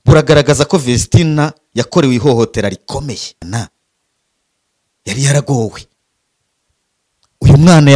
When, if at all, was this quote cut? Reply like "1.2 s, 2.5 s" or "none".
3.4 s